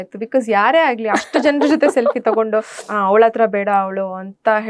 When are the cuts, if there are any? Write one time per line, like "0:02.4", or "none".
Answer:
none